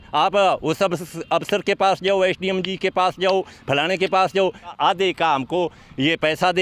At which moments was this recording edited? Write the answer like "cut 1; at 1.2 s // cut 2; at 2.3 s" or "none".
cut 1; at 4.6 s